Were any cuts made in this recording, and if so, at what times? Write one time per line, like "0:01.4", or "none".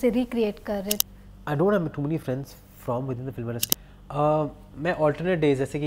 0:01.0
0:03.7